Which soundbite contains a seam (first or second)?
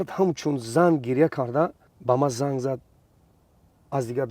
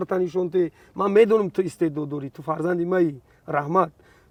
first